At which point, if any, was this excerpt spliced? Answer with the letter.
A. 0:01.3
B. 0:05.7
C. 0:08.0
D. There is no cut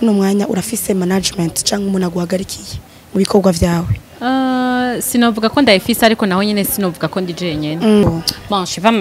C